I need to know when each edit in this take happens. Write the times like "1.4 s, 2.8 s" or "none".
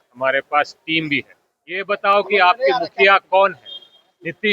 1.8 s